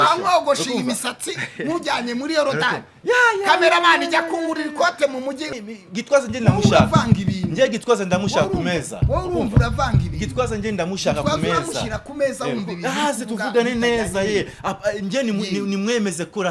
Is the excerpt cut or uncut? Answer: cut